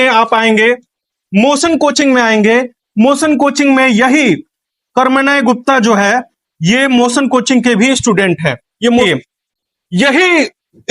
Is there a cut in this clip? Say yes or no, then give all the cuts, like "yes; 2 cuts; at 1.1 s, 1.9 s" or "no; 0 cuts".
yes; 1 cut; at 9.0 s